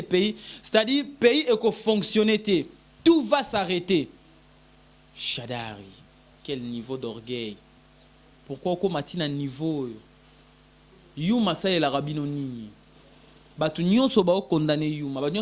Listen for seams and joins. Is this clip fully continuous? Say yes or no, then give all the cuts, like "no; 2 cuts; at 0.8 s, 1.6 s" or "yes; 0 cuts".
yes; 0 cuts